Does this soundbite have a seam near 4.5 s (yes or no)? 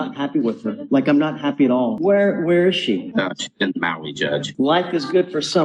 yes